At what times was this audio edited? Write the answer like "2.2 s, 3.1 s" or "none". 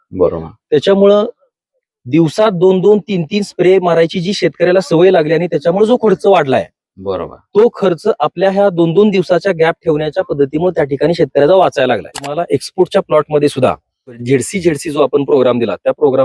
12.3 s, 14.2 s